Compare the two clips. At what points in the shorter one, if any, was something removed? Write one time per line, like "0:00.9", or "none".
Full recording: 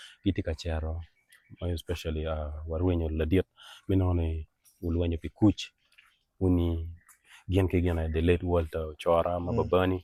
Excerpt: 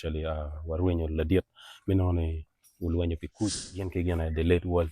0:03.9